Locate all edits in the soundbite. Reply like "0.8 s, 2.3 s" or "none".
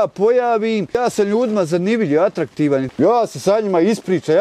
1.0 s, 2.9 s